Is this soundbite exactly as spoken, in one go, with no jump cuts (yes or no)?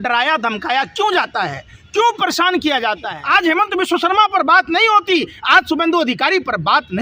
no